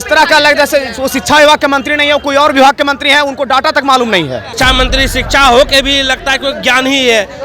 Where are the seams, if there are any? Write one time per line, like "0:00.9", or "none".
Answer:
0:04.5